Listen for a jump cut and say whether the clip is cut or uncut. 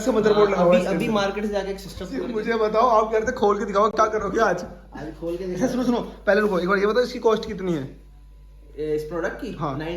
cut